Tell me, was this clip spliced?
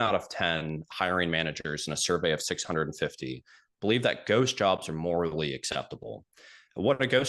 no; 0 cuts

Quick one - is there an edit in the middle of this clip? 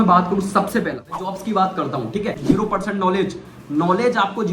yes; 2 cuts; at 1.3 s, 2.4 s

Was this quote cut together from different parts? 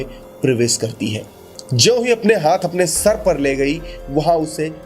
yes; 1 cut; at 1.6 s

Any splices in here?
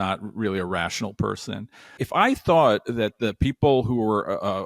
yes; 1 cut; at 2.0 s

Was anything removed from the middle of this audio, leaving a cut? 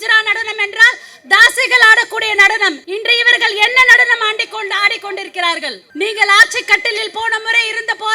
yes; 2 cuts; at 2.8 s, 5.8 s

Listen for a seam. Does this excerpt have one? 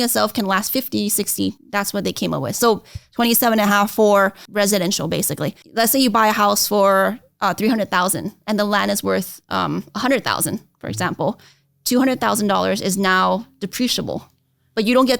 yes; 3 cuts; at 1.6 s, 4.4 s, 5.6 s

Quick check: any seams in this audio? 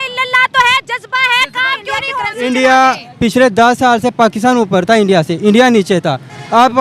yes; 1 cut; at 2.1 s

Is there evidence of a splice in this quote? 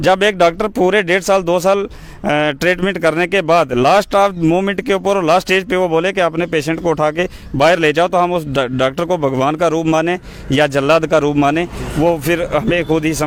no; 0 cuts

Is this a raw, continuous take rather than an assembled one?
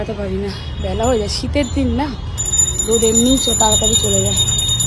yes; 0 cuts

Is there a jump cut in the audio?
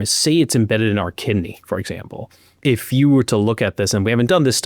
no; 0 cuts

